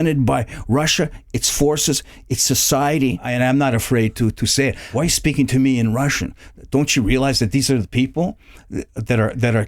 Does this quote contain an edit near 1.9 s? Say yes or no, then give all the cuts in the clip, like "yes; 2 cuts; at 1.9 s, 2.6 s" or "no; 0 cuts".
no; 2 cuts; at 3.3 s, 4.8 s